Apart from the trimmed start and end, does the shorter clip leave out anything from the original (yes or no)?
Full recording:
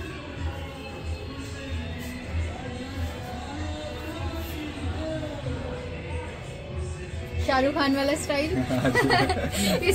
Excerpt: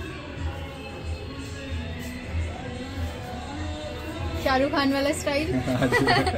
yes